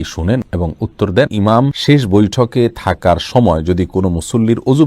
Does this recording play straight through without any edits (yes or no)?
no